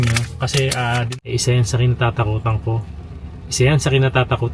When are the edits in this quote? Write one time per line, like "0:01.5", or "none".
0:01.1